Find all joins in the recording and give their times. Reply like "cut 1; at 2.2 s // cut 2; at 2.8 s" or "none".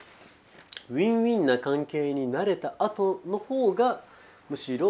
none